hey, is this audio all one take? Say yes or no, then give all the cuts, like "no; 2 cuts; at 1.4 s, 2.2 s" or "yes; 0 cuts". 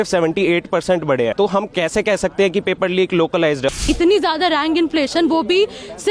no; 2 cuts; at 1.3 s, 3.8 s